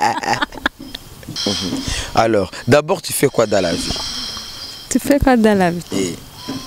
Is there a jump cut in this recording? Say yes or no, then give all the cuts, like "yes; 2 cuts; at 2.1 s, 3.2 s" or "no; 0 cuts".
yes; 1 cut; at 1.3 s